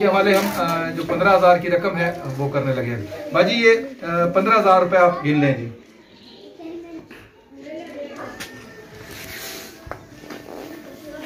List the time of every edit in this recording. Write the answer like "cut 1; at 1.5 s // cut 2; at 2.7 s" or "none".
cut 1; at 8.2 s